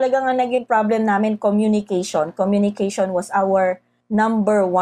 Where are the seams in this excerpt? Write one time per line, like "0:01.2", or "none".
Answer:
0:03.9